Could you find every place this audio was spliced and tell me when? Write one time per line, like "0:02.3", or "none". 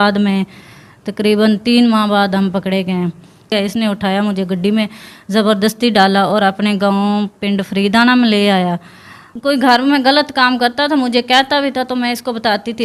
0:03.5
0:08.7